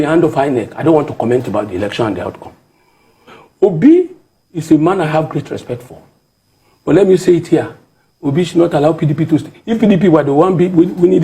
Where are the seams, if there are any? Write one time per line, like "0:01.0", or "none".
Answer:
none